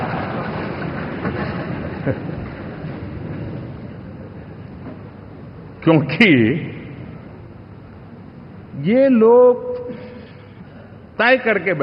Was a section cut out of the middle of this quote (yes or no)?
no